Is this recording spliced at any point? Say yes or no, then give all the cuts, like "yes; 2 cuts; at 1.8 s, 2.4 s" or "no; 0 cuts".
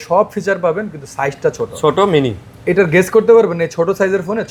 no; 0 cuts